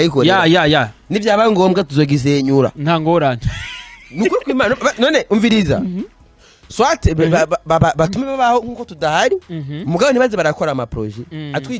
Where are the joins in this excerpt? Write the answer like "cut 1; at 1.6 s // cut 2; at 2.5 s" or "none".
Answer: none